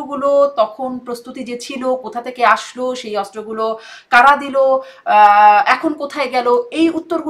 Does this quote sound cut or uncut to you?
uncut